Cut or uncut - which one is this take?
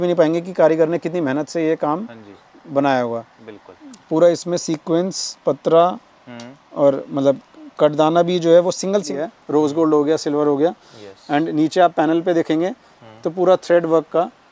cut